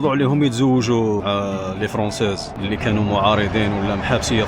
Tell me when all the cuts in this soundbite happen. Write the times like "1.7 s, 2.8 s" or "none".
1.2 s